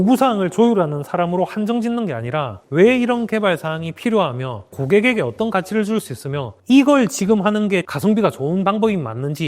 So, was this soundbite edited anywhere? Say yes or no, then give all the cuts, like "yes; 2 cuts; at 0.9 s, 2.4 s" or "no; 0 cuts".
yes; 3 cuts; at 4.7 s, 6.5 s, 7.9 s